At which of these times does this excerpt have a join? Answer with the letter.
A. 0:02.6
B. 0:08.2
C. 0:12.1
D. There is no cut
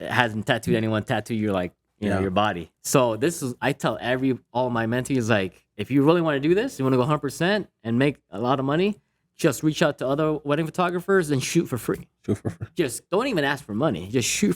A